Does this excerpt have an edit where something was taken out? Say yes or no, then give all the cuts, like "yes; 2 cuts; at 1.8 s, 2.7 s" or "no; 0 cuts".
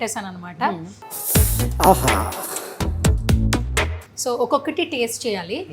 no; 0 cuts